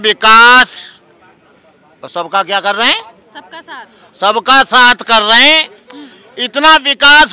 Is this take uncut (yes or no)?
yes